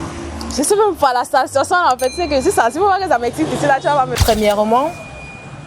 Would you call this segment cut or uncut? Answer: cut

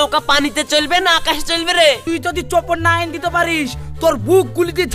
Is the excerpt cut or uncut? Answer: cut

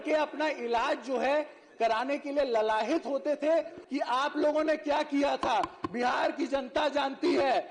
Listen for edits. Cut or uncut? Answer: cut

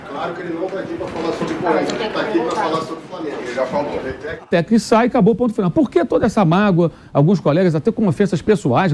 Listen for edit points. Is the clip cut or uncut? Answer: cut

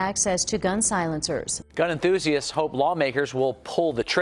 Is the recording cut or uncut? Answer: cut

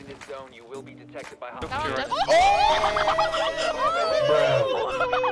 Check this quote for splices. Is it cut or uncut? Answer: uncut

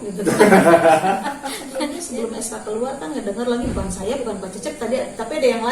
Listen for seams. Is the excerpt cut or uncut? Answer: cut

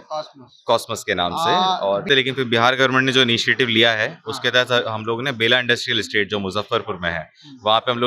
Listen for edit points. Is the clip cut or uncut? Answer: cut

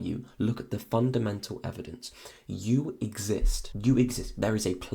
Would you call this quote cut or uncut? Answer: cut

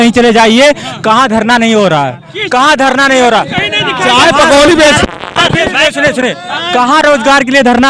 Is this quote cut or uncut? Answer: uncut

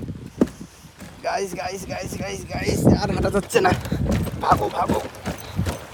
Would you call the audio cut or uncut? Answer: uncut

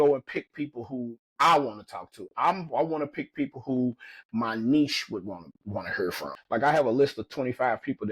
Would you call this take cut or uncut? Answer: cut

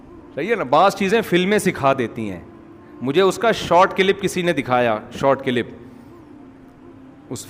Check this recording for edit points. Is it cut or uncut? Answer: uncut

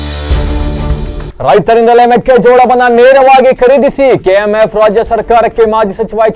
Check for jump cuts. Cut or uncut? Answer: cut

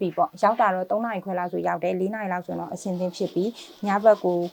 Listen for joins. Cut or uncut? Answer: uncut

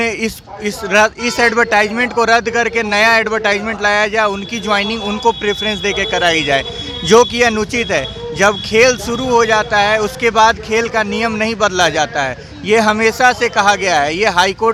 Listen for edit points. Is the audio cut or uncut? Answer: uncut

